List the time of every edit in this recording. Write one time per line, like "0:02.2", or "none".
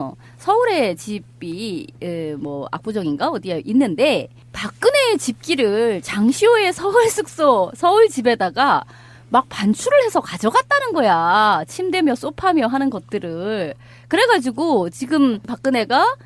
0:03.9